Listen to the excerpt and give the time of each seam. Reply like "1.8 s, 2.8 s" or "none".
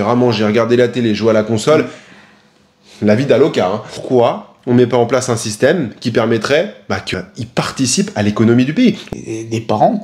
3.9 s, 7.1 s, 9.0 s